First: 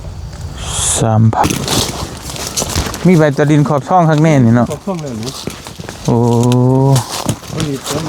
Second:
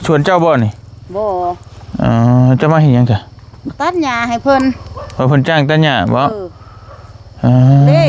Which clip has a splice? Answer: first; 1 cut; at 1.4 s

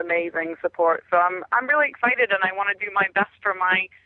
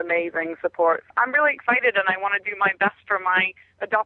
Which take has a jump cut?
second; 1 cut; at 1.0 s

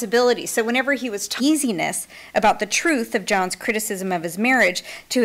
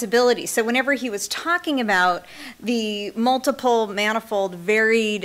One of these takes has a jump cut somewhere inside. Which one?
second; 1 cut; at 1.4 s

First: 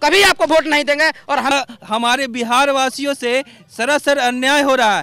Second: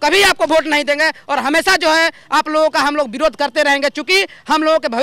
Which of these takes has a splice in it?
first; 1 cut; at 1.5 s

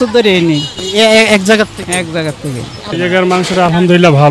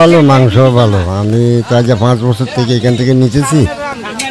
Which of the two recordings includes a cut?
first; 1 cut; at 2.9 s

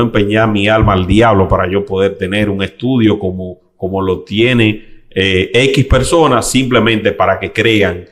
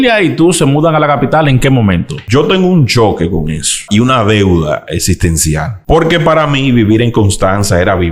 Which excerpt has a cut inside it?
second; 3 cuts; at 2.2 s, 3.8 s, 5.7 s

